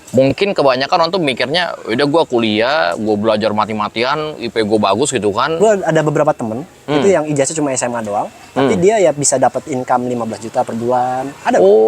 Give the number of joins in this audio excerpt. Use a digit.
1